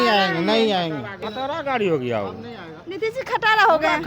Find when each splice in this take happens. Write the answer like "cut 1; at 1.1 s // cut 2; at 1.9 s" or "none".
cut 1; at 1.2 s